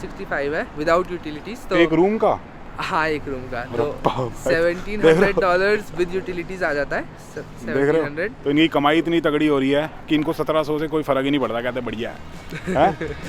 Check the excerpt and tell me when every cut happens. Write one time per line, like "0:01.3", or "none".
none